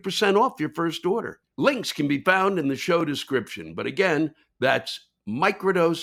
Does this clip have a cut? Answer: no; 0 cuts

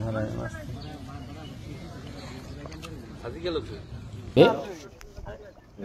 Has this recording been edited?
yes; 1 cut; at 4.3 s

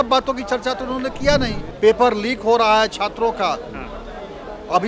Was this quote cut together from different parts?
yes; 1 cut; at 1.6 s

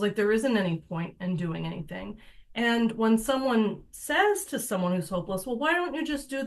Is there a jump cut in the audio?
no; 0 cuts

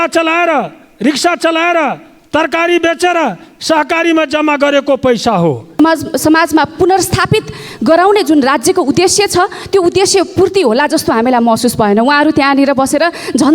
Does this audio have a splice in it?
yes; 1 cut; at 5.8 s

